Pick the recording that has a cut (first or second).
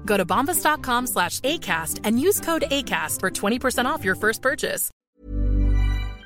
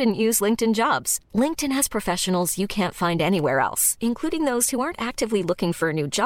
first